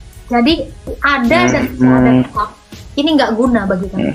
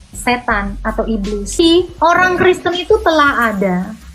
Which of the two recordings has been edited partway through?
second; 1 cut; at 1.6 s

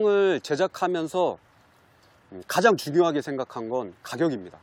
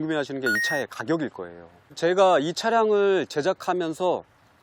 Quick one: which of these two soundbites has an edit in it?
second; 1 cut; at 1.9 s

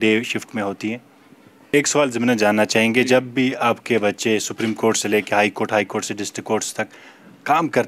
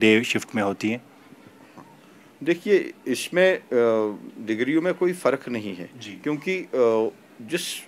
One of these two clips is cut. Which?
first; 1 cut; at 1.7 s

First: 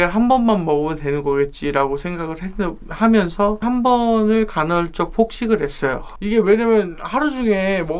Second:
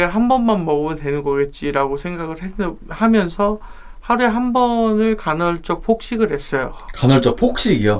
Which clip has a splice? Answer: first; 2 cuts; at 3.6 s, 6.1 s

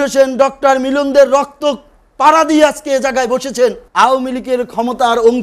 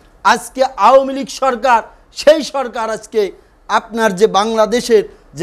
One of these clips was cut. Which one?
first; 1 cut; at 3.8 s

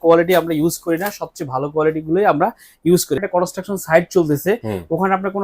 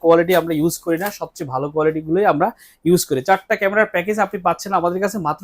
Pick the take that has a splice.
first; 1 cut; at 3.2 s

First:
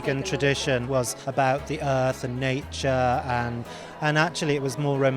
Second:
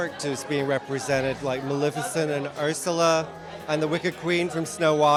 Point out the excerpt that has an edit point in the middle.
first; 1 cut; at 1.0 s

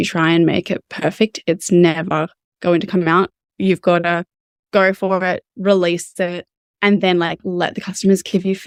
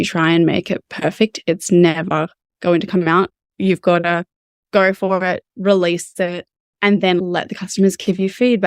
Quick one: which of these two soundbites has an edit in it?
second; 1 cut; at 7.2 s

